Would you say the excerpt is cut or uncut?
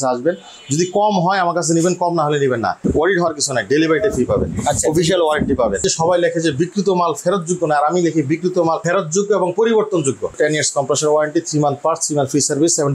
cut